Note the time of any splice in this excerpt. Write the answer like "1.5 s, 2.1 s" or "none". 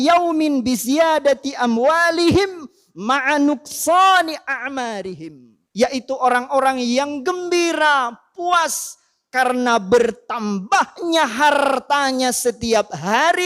5.3 s